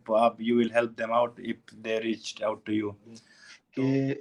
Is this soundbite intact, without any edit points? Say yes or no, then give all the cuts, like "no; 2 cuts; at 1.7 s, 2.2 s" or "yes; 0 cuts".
no; 1 cut; at 3.3 s